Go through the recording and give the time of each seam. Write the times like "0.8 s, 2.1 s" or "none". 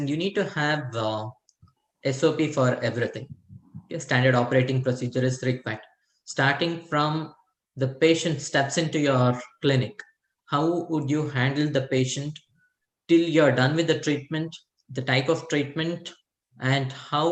none